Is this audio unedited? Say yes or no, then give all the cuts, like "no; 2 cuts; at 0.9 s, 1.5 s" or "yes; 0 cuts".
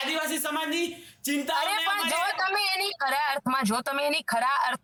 yes; 0 cuts